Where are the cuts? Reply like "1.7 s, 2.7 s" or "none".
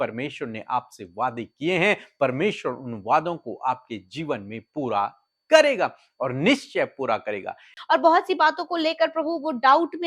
7.7 s